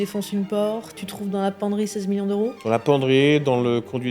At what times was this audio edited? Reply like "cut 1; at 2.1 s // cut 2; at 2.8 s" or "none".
cut 1; at 0.9 s